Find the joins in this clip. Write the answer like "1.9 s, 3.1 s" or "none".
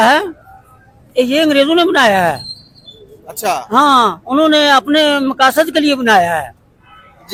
none